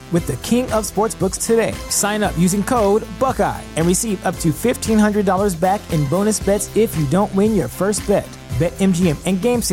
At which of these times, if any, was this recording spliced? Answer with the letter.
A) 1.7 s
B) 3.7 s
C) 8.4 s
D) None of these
D